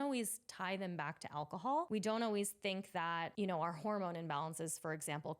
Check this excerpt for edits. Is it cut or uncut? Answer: cut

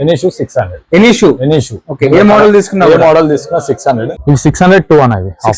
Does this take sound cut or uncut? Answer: cut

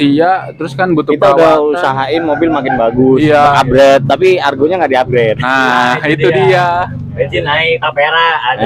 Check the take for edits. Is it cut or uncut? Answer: uncut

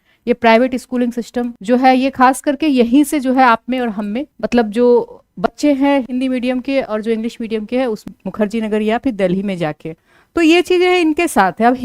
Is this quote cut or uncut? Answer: cut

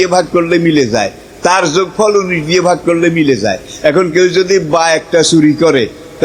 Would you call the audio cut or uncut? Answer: uncut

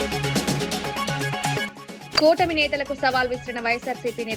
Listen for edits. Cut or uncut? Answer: cut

